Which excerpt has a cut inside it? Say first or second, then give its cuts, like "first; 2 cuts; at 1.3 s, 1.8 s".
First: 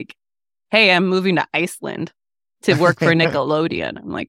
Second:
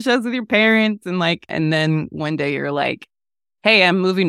second; 1 cut; at 1.5 s